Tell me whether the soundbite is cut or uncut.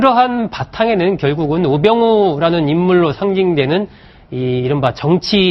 uncut